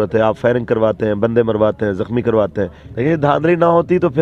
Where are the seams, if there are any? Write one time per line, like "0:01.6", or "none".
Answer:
0:02.8